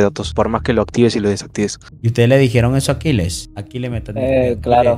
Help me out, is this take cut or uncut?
uncut